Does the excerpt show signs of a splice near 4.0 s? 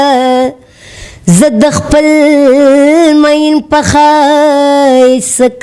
no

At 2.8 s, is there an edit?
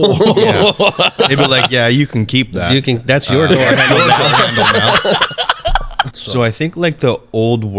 no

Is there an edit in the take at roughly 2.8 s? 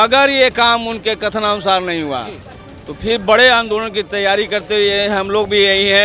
no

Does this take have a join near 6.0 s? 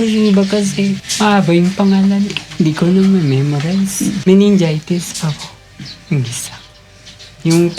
no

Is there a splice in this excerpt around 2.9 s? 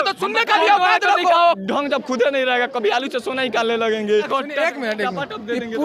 no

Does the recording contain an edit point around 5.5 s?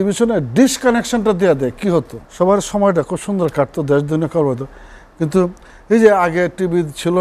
no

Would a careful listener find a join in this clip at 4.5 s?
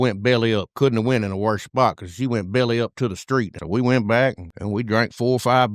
yes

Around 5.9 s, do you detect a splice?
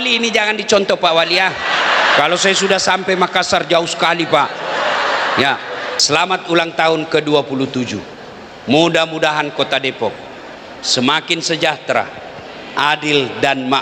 yes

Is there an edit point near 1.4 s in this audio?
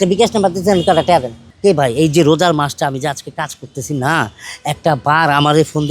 yes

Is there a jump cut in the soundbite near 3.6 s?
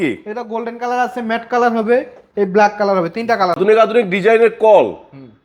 yes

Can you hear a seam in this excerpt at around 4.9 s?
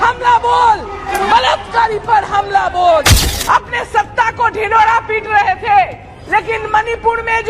no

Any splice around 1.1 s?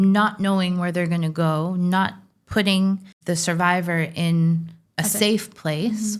no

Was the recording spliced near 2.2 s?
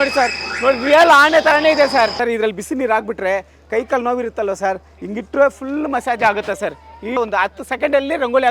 yes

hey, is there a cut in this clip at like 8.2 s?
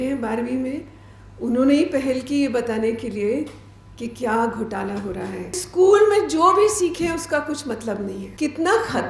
yes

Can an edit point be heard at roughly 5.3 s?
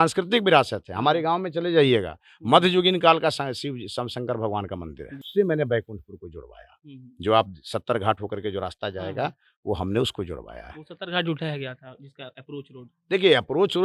yes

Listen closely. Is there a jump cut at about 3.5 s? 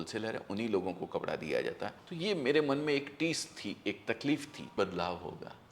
no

